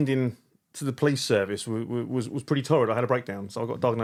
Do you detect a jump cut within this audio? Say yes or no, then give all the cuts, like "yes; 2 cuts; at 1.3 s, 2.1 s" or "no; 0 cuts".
no; 0 cuts